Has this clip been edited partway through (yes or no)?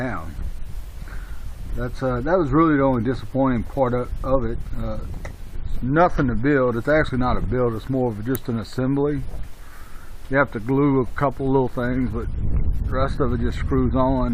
no